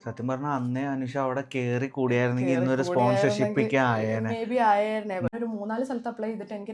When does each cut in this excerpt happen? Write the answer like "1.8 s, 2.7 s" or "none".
5.4 s